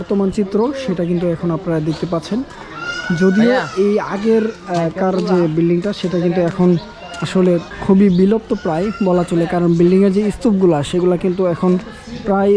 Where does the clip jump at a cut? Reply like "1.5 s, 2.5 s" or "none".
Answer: none